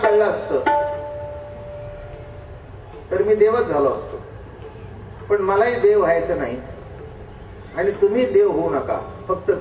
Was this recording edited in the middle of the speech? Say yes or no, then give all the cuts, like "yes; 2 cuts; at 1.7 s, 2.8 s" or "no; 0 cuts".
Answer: no; 0 cuts